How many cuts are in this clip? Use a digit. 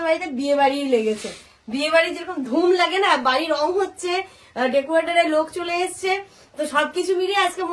0